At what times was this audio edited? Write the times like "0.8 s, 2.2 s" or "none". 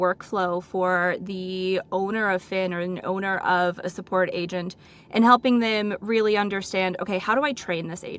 none